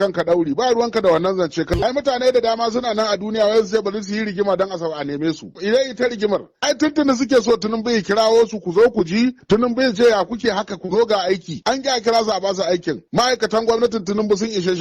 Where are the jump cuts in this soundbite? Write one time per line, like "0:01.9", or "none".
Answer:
0:01.7
0:05.5
0:06.5